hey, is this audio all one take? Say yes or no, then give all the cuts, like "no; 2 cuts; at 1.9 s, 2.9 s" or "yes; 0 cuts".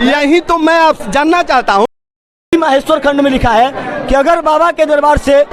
no; 1 cut; at 2.1 s